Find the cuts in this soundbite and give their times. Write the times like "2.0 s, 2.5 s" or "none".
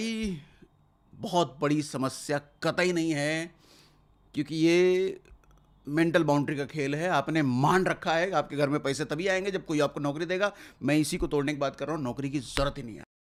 none